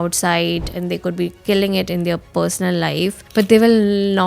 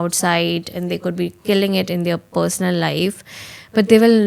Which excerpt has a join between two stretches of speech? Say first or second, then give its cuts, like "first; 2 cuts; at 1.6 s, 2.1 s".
first; 1 cut; at 3.2 s